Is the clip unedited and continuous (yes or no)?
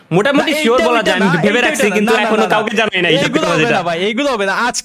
yes